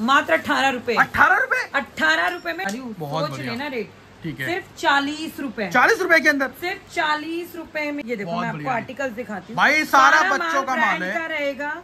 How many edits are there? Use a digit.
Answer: 2